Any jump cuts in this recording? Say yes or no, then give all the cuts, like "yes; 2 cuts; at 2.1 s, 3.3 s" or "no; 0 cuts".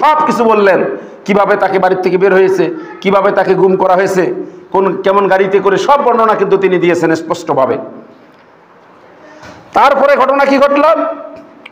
no; 0 cuts